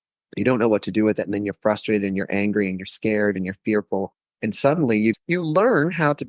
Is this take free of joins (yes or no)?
no